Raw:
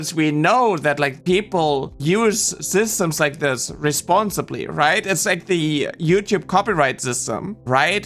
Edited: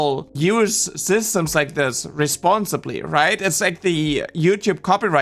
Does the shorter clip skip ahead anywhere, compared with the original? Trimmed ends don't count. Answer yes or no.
no